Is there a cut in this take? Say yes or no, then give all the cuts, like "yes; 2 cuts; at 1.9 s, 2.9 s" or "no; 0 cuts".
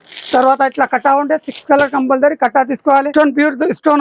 yes; 1 cut; at 3.1 s